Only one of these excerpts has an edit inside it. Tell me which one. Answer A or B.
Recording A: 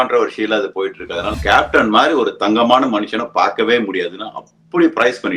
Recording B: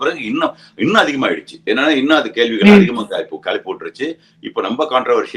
A